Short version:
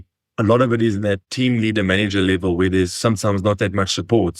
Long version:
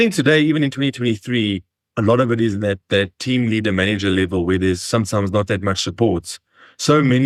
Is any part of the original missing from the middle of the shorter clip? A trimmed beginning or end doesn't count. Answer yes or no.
yes